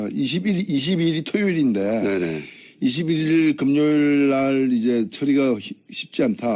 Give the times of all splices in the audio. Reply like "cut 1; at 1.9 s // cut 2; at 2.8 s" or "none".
cut 1; at 2.8 s